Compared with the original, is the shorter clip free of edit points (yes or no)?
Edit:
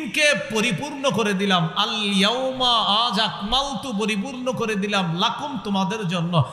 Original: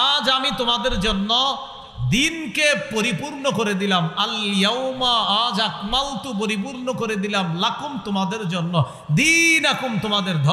yes